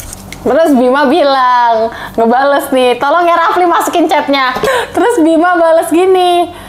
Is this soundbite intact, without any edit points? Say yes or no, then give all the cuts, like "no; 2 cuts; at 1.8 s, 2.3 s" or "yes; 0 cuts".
no; 1 cut; at 4.7 s